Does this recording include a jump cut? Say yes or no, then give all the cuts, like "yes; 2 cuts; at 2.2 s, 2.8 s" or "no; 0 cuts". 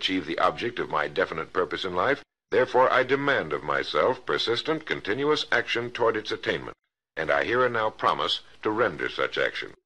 no; 0 cuts